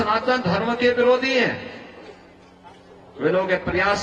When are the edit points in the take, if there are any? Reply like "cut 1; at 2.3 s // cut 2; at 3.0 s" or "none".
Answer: none